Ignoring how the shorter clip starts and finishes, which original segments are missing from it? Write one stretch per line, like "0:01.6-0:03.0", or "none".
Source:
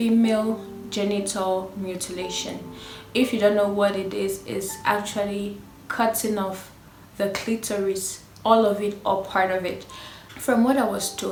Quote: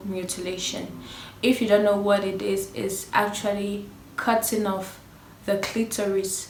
none